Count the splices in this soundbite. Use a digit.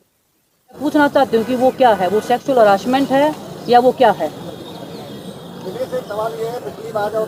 0